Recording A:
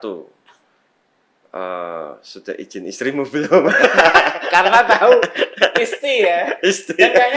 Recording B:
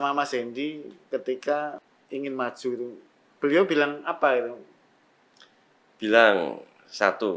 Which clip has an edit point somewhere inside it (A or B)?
B